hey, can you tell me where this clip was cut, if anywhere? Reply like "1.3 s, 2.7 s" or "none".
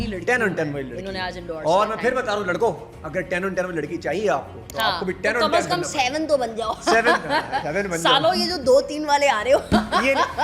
none